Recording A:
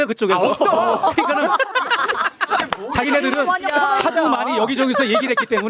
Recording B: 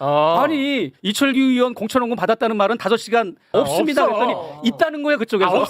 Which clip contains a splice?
B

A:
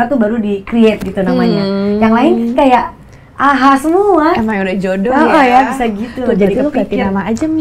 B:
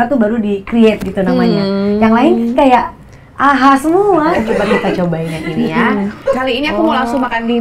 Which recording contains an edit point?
B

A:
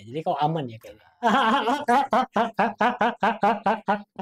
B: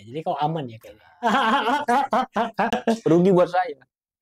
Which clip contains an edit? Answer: B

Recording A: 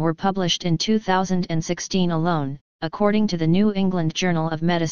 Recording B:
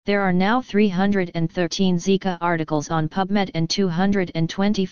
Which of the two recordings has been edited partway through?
A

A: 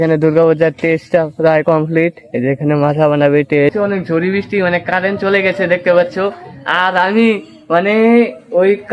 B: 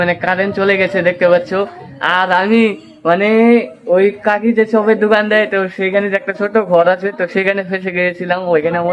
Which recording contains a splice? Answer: A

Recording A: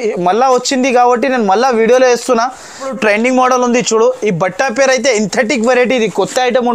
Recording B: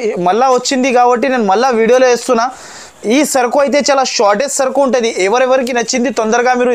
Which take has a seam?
A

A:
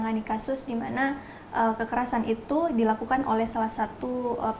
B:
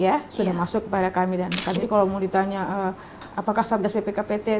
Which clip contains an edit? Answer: B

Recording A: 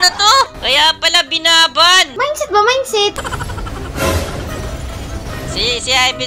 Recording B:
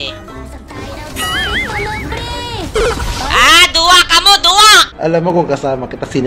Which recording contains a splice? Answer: A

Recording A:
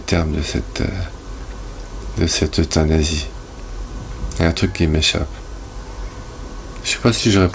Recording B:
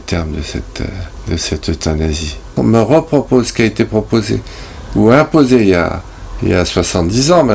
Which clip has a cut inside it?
B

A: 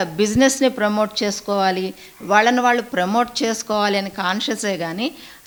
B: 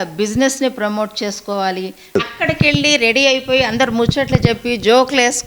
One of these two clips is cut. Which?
B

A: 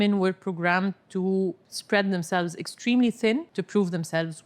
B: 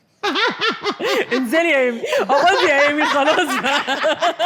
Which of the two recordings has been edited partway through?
A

